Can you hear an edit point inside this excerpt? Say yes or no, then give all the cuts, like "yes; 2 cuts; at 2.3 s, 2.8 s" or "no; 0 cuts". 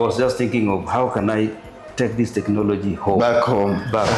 no; 0 cuts